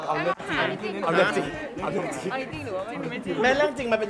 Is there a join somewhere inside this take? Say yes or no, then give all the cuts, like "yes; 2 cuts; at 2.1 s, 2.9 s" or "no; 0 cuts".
no; 0 cuts